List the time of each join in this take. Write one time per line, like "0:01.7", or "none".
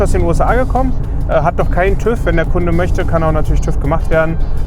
none